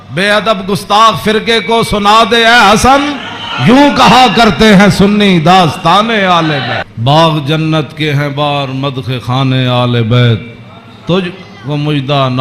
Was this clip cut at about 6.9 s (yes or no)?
yes